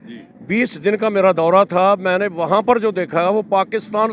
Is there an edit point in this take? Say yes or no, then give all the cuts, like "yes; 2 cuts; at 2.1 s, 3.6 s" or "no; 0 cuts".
no; 0 cuts